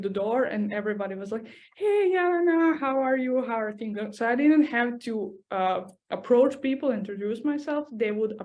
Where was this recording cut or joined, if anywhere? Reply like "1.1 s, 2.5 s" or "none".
none